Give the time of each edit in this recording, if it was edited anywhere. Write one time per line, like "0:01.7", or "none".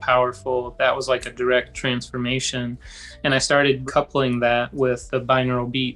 0:03.8
0:05.0